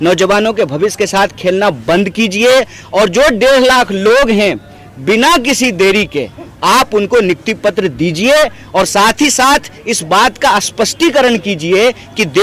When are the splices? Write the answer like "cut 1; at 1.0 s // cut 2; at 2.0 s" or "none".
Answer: none